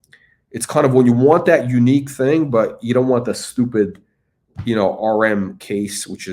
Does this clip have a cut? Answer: no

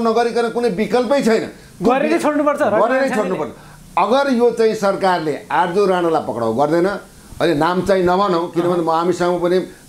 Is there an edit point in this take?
no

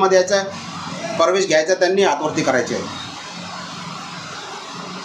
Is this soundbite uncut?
yes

